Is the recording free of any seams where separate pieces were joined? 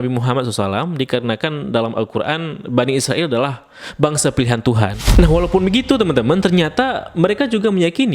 no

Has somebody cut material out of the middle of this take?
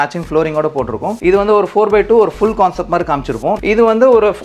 yes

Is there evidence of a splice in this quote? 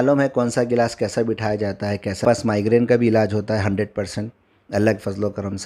yes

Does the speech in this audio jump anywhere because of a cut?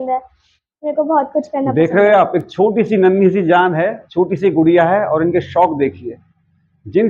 no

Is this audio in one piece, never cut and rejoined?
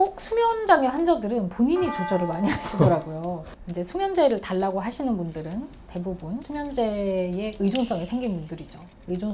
no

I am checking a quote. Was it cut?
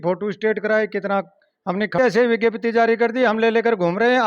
yes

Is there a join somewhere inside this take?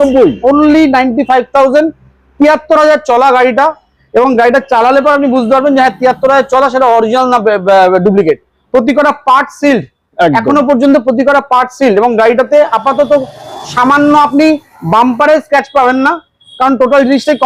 no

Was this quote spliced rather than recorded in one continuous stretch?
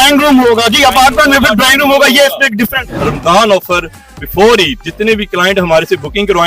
yes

